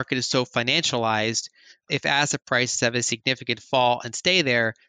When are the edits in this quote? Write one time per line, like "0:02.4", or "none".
0:01.9